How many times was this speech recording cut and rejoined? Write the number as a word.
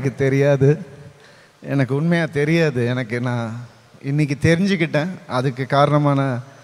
zero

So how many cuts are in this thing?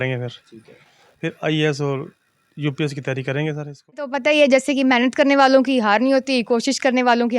one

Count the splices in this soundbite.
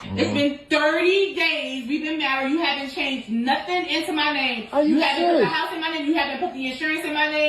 zero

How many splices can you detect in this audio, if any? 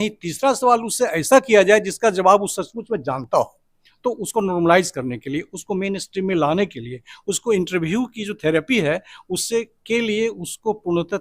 zero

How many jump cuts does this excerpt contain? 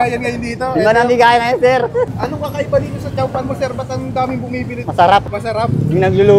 three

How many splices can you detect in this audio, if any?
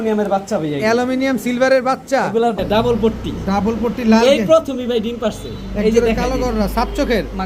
one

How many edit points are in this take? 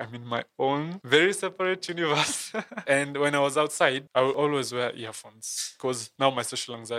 four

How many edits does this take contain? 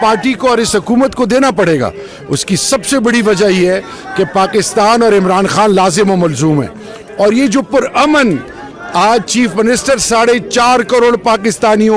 zero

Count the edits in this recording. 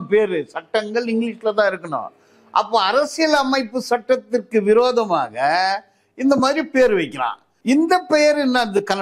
zero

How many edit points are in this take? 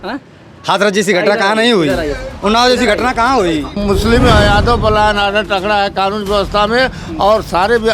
one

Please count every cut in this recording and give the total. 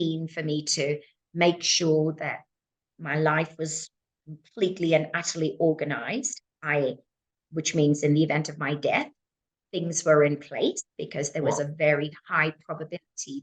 zero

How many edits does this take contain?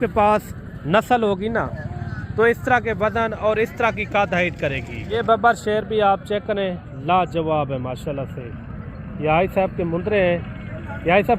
one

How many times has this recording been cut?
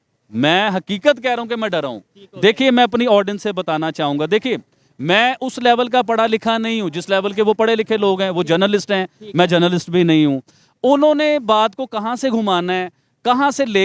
zero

